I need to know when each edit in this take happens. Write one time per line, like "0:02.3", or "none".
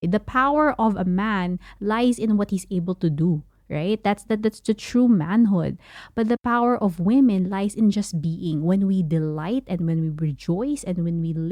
none

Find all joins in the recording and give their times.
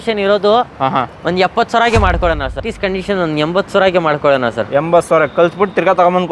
0:02.7

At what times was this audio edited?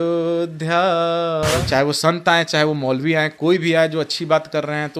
0:01.6

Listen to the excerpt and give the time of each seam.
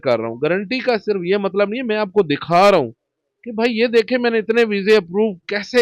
none

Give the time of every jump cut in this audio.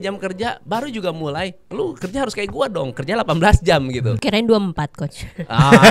0:04.1

